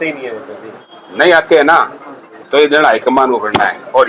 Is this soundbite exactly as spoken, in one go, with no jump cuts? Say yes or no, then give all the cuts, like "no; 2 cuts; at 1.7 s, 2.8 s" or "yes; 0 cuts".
yes; 0 cuts